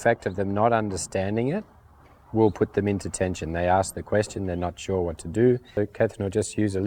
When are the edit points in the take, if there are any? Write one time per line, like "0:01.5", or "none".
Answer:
0:05.8